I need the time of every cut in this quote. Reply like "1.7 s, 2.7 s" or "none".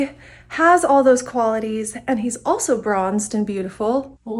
none

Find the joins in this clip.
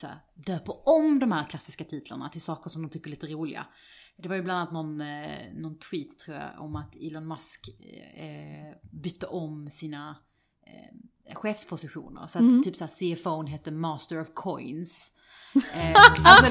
none

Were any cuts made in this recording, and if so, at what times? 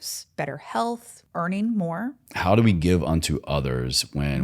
1.2 s, 2.3 s

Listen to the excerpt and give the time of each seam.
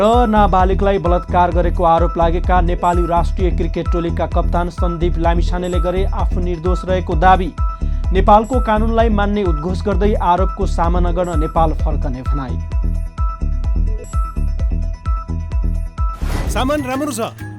16.5 s

